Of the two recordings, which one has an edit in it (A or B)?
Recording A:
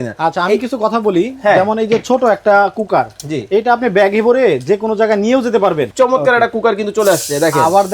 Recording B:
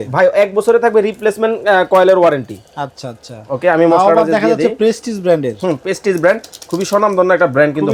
A